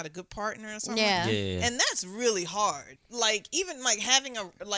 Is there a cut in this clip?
yes; 1 cut; at 2.9 s

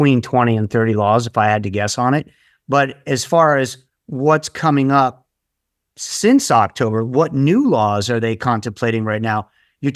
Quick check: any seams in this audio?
no; 0 cuts

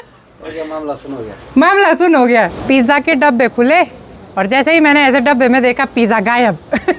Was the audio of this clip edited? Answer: yes; 1 cut; at 2.6 s

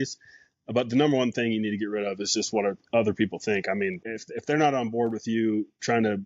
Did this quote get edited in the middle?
yes; 1 cut; at 4.1 s

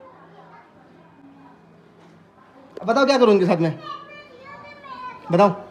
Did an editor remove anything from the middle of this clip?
no; 0 cuts

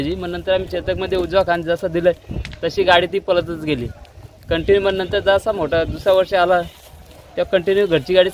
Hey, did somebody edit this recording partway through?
no; 0 cuts

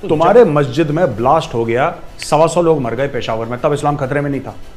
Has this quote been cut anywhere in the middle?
no; 0 cuts

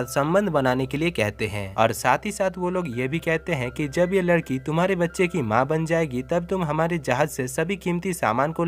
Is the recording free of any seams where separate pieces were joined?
yes; 0 cuts

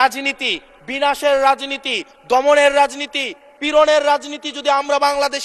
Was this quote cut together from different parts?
no; 0 cuts

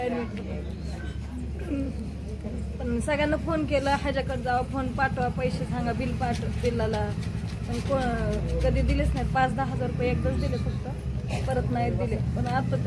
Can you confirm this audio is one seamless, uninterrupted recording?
yes; 0 cuts

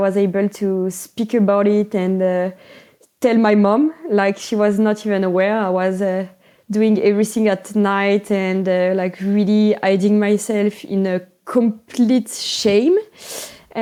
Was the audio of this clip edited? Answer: no; 0 cuts

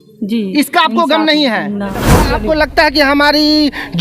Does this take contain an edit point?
yes; 1 cut; at 2.3 s

